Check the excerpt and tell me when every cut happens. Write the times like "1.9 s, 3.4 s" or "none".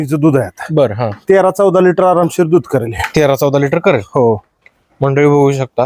none